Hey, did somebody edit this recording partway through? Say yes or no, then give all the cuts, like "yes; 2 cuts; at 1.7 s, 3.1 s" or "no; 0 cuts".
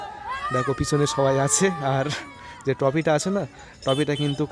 no; 0 cuts